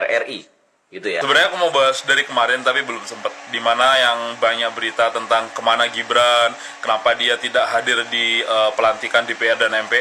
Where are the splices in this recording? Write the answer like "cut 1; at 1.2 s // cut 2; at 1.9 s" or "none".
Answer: cut 1; at 1.2 s